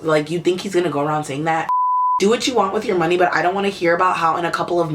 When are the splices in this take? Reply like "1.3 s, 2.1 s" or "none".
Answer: 1.8 s